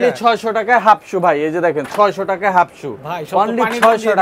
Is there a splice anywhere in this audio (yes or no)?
no